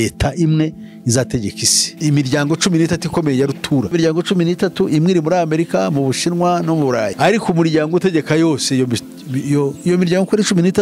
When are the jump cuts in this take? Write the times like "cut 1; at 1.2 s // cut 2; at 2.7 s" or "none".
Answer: cut 1; at 2.0 s // cut 2; at 3.9 s // cut 3; at 7.1 s